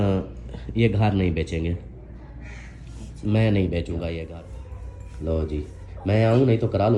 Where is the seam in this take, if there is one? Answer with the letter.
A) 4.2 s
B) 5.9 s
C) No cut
A